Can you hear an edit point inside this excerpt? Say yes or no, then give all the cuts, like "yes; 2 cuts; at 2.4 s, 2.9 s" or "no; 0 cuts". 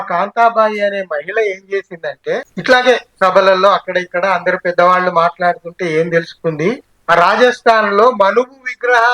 yes; 2 cuts; at 2.5 s, 6.9 s